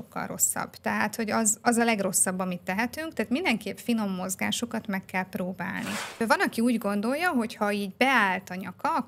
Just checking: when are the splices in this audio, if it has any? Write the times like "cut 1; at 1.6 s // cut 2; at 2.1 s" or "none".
cut 1; at 6.2 s